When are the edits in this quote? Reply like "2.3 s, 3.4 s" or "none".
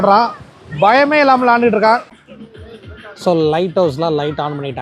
2.1 s